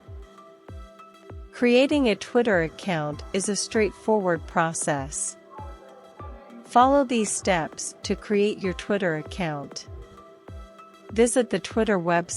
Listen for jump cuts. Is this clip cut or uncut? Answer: cut